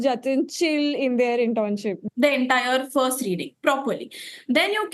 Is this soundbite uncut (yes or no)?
no